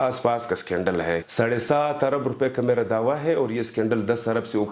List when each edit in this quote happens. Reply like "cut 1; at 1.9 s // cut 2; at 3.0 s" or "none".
cut 1; at 1.3 s